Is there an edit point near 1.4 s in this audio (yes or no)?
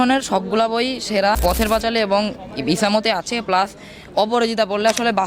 yes